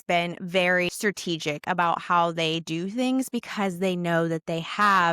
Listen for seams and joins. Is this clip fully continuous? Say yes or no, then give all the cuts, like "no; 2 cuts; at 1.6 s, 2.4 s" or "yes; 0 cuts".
no; 1 cut; at 0.9 s